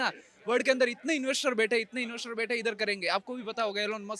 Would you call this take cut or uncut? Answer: uncut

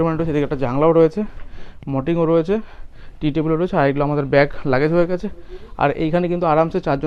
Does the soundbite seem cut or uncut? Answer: uncut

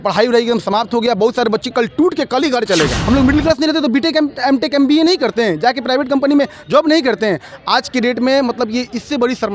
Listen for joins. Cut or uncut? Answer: cut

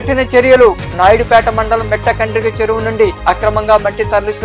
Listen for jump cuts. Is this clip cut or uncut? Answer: uncut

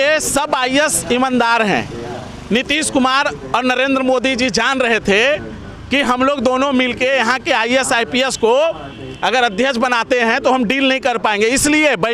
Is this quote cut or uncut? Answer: uncut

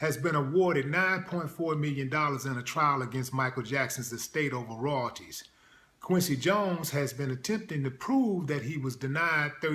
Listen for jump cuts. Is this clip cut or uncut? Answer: uncut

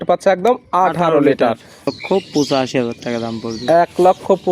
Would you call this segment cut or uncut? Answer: cut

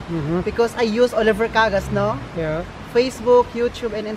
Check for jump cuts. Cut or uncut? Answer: uncut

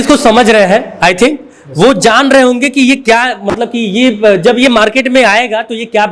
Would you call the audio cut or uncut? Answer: uncut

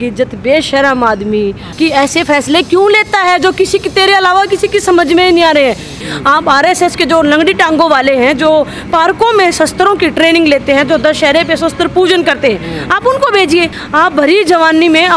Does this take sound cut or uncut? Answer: cut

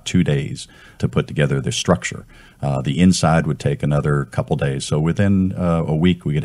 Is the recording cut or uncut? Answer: cut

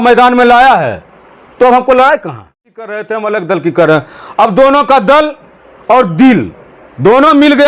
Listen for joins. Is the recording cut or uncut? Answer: cut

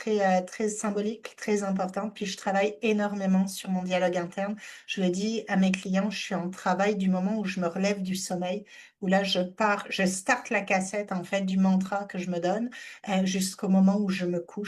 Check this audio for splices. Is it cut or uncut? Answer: uncut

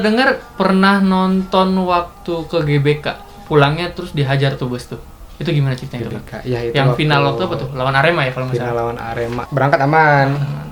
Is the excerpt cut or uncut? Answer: cut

